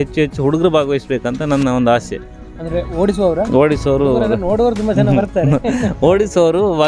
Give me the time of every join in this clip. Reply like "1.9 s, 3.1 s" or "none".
none